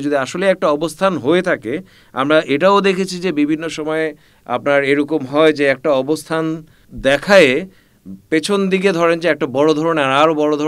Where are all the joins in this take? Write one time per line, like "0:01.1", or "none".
0:06.9